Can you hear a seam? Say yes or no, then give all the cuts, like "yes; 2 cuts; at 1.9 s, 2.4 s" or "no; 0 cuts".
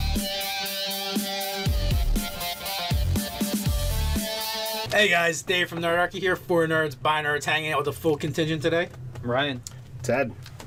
no; 0 cuts